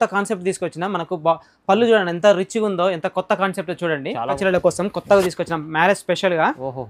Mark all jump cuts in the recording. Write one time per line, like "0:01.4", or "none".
0:04.4